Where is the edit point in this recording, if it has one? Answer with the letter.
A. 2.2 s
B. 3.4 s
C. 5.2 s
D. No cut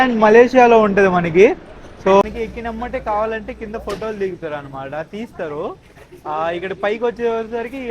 A